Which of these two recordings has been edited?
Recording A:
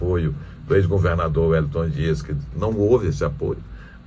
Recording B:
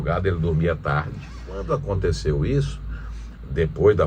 B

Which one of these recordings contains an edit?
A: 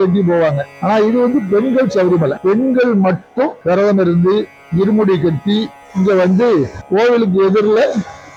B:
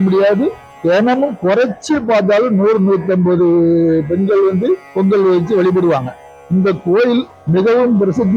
B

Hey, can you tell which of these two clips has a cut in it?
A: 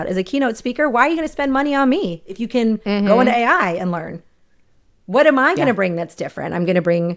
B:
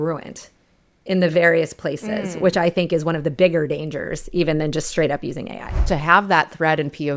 B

